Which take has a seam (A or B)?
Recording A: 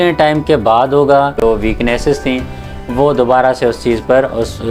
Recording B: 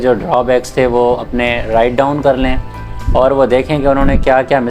A